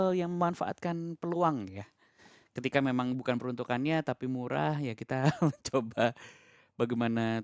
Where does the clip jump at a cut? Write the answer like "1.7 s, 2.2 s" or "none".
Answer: none